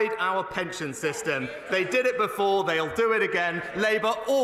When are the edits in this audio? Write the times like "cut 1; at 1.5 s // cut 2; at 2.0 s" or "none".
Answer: none